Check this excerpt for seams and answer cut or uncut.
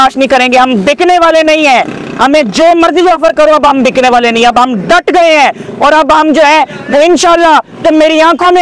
uncut